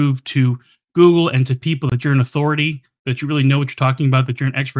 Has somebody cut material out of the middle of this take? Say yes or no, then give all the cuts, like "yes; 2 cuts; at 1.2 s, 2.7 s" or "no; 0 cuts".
no; 0 cuts